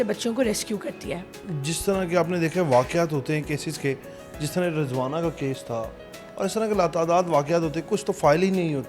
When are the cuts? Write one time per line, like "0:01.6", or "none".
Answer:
none

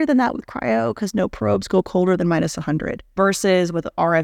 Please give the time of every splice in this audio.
0:03.1

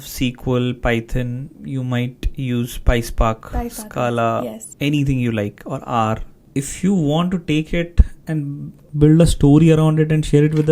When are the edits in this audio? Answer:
0:04.6
0:06.3
0:08.4

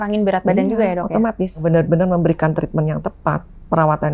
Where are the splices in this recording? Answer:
0:01.6

